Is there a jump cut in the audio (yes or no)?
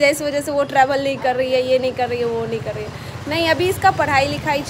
no